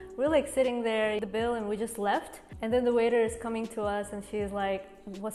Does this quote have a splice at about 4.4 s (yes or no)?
no